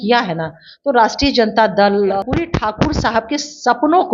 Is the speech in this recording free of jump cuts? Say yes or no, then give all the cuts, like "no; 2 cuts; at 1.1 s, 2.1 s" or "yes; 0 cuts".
no; 1 cut; at 2.2 s